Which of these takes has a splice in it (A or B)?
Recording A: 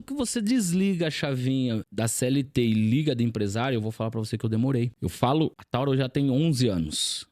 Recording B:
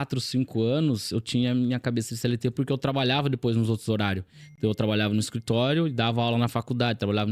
A